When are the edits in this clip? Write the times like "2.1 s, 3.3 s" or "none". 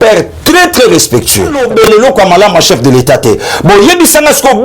1.6 s